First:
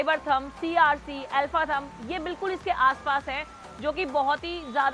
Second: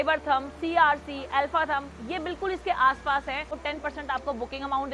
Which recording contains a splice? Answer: second; 1 cut; at 3.5 s

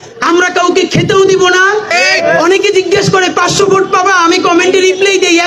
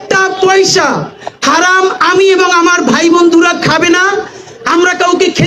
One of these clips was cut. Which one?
first; 1 cut; at 2.0 s

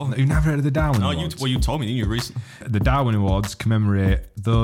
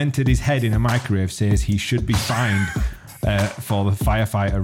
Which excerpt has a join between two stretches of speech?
first; 1 cut; at 2.6 s

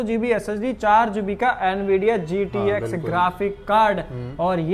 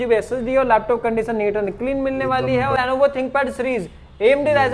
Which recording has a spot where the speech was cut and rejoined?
second; 1 cut; at 2.8 s

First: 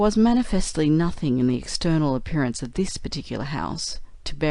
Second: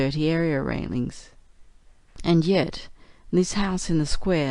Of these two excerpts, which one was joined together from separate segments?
first; 1 cut; at 3.2 s

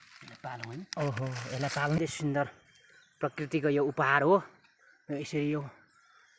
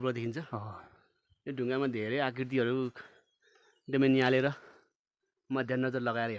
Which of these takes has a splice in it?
first; 1 cut; at 2.0 s

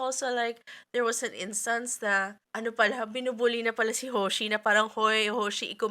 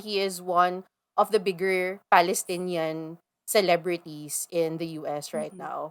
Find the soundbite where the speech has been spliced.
first; 1 cut; at 2.4 s

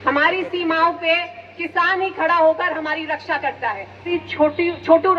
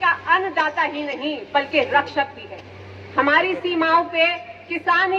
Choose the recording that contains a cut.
first; 1 cut; at 4.1 s

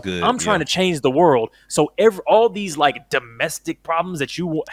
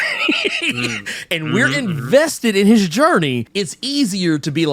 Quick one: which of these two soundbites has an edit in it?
second; 1 cut; at 3.5 s

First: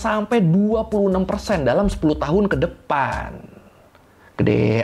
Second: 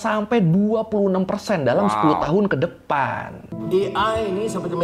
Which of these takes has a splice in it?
second; 1 cut; at 3.6 s

